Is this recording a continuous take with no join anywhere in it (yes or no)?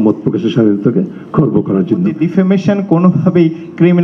no